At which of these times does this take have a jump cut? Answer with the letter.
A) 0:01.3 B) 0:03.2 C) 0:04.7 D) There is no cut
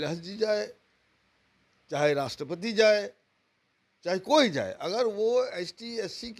D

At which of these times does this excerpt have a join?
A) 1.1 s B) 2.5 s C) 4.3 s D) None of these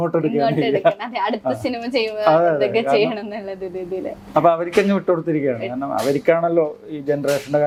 D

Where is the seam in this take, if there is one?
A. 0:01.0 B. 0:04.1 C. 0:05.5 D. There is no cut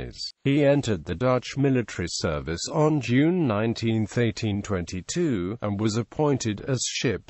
C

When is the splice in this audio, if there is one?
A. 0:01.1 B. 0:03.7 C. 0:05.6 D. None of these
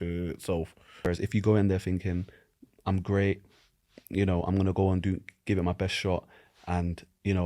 A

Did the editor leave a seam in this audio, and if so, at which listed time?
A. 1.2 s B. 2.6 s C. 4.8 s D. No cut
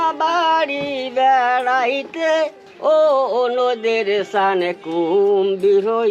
B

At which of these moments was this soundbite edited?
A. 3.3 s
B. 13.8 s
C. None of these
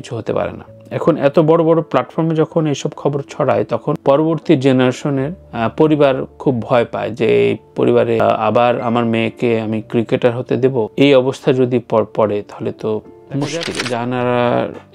B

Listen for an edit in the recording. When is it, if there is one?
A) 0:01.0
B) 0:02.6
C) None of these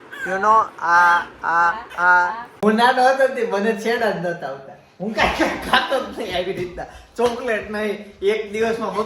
B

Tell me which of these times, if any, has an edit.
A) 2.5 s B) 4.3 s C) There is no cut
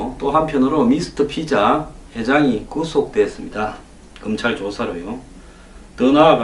A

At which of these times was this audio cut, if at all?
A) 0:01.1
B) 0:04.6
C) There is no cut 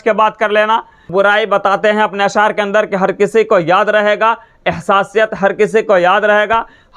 A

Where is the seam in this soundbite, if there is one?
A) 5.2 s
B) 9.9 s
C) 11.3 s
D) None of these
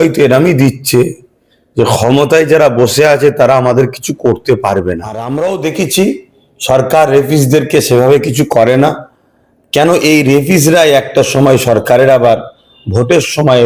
A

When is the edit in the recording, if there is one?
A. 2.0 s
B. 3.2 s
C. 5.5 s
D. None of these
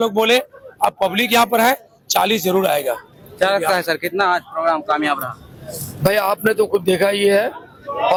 D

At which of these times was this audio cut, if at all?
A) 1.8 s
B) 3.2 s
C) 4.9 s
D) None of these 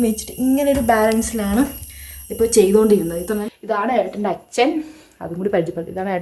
B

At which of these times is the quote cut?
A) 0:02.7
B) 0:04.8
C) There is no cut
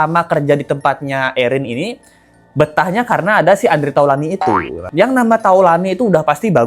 B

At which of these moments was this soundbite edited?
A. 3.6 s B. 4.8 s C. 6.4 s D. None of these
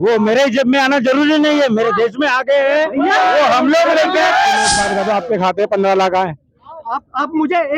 B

